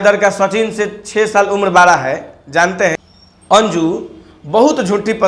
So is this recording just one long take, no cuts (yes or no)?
no